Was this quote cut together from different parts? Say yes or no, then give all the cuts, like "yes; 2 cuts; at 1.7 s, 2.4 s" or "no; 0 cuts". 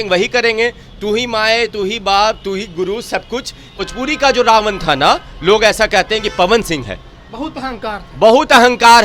yes; 1 cut; at 3.7 s